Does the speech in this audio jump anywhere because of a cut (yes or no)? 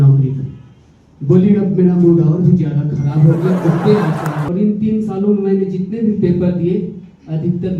yes